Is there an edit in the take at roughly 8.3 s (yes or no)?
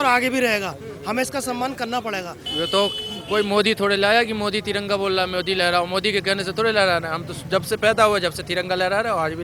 no